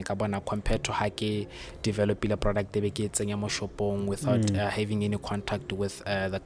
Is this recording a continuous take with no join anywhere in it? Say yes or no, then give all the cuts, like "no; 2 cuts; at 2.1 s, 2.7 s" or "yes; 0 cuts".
yes; 0 cuts